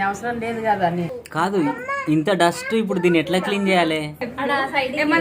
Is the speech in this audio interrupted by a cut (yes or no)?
yes